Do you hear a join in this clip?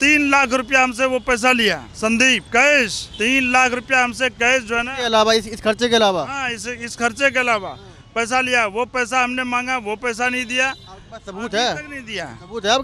no; 0 cuts

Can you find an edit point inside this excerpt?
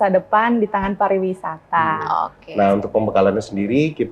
yes; 1 cut; at 2.4 s

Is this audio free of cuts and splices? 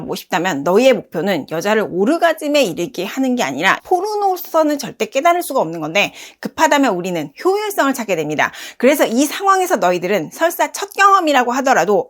no; 1 cut; at 3.8 s

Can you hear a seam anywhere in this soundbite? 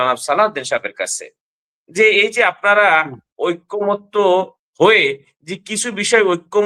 no; 0 cuts

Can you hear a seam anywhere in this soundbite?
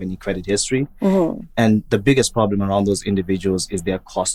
no; 0 cuts

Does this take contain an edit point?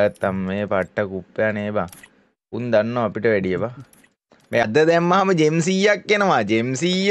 yes; 1 cut; at 4.6 s

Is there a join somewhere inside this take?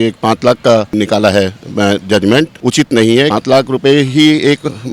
yes; 3 cuts; at 0.9 s, 2.5 s, 3.3 s

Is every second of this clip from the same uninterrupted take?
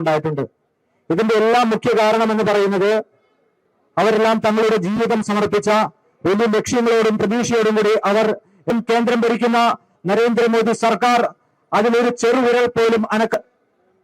no; 2 cuts; at 8.7 s, 13.3 s

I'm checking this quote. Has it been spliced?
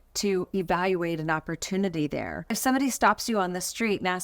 yes; 1 cut; at 2.4 s

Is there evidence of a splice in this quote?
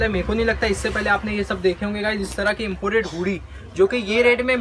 no; 0 cuts

